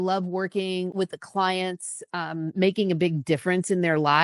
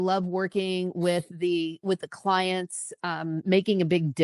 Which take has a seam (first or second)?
first